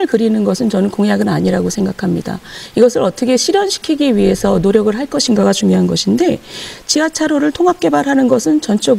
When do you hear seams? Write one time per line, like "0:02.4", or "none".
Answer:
none